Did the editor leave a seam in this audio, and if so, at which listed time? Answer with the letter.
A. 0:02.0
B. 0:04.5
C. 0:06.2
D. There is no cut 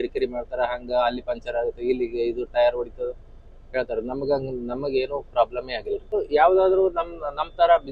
C